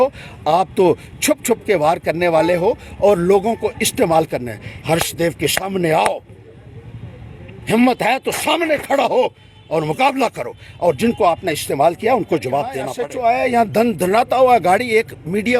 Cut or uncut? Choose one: cut